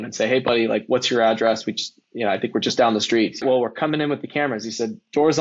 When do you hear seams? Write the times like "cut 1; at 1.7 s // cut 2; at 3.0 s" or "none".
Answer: cut 1; at 3.4 s